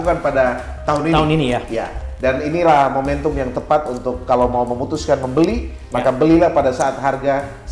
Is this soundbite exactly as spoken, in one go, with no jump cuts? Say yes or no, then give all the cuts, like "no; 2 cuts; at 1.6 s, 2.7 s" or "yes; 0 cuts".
yes; 0 cuts